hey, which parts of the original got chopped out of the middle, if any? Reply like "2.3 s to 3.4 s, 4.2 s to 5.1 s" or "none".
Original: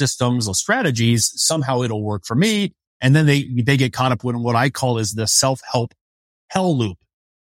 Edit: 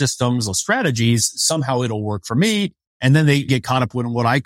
3.5 s to 3.8 s